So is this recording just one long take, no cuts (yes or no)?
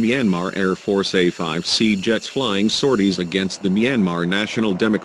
yes